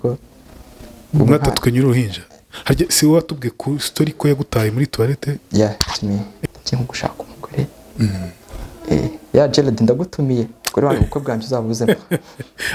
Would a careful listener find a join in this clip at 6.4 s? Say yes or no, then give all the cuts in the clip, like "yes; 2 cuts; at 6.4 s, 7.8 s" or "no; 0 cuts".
yes; 2 cuts; at 5.3 s, 6.4 s